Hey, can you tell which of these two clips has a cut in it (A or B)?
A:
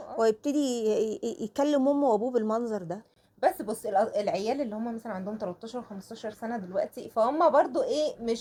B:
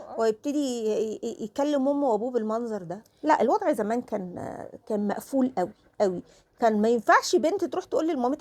B